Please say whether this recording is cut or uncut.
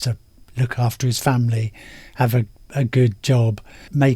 uncut